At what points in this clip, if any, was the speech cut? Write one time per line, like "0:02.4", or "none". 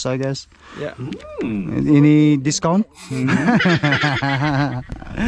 none